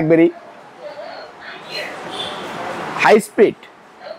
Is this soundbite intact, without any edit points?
yes; 0 cuts

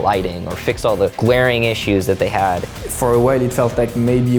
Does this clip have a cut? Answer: yes; 2 cuts; at 1.2 s, 2.8 s

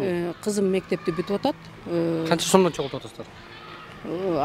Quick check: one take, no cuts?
yes; 0 cuts

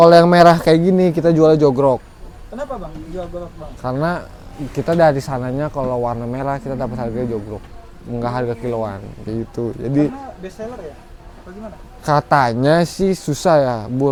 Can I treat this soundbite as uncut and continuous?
yes; 0 cuts

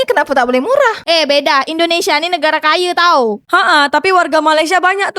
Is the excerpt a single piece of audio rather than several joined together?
no; 1 cut; at 1.0 s

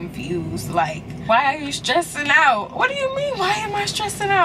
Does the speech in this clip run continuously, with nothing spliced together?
yes; 0 cuts

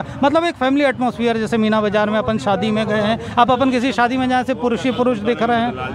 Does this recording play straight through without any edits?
yes; 0 cuts

